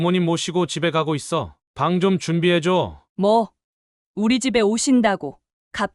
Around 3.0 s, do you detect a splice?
yes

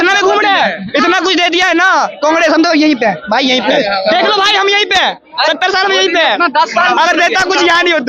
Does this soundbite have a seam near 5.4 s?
no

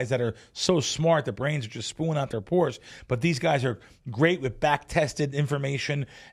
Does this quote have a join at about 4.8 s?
no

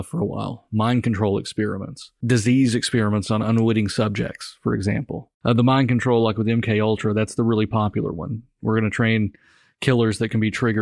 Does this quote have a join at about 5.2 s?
yes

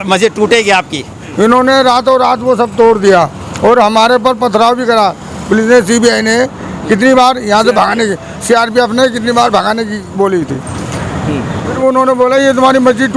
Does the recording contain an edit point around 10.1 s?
no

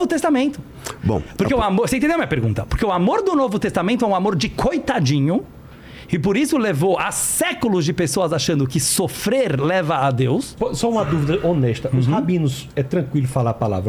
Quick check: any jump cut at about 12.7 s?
no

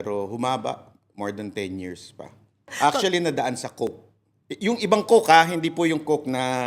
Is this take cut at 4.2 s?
no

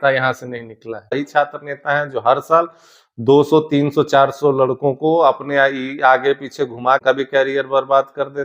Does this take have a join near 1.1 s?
yes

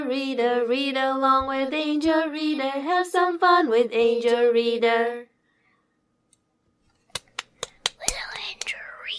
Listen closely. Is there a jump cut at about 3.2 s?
no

